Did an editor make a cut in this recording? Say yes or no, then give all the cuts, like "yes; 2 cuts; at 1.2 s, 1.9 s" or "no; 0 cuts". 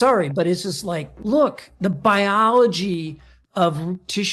no; 0 cuts